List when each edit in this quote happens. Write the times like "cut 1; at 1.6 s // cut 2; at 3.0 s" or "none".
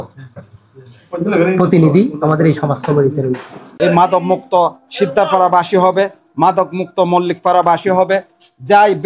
cut 1; at 3.7 s